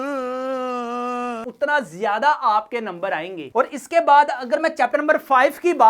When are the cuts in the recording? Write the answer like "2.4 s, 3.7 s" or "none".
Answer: 1.4 s, 3.4 s